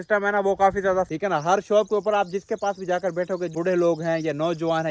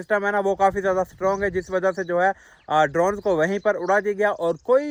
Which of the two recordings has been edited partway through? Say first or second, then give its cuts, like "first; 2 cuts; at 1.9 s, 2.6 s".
first; 2 cuts; at 1.1 s, 3.5 s